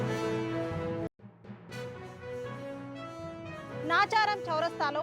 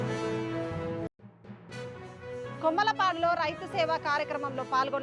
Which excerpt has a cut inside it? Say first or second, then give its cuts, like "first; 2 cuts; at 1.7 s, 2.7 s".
first; 1 cut; at 2.6 s